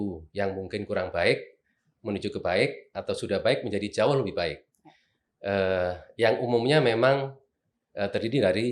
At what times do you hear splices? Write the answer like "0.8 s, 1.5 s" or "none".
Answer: none

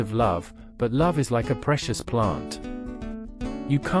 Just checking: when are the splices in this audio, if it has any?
none

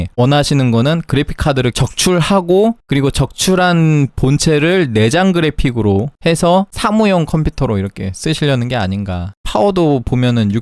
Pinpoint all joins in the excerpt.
6.7 s, 9.3 s

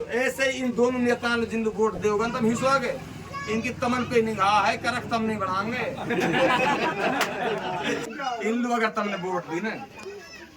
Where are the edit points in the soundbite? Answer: 8.0 s

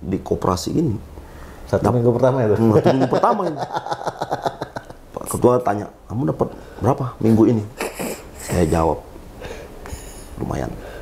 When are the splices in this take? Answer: none

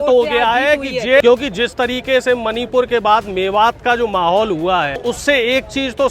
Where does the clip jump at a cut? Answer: 1.2 s, 5.0 s

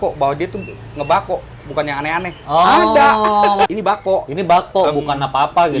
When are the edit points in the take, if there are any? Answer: 3.7 s

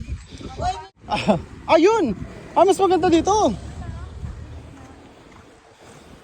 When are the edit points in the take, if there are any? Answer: 0.9 s

